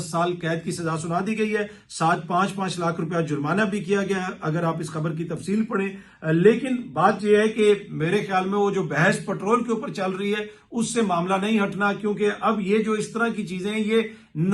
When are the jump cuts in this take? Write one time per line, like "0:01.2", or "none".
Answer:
none